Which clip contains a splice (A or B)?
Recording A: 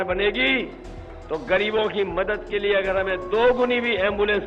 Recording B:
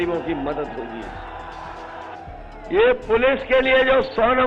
B